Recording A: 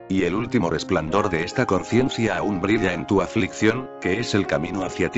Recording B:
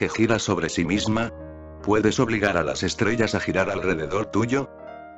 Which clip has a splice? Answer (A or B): A